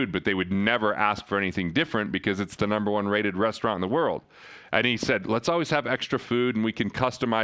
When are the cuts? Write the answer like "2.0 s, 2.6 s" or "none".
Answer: none